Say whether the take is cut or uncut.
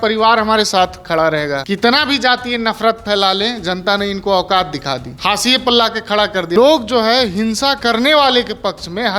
cut